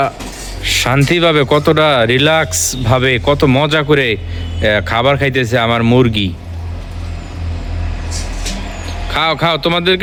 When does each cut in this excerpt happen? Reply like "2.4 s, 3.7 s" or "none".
none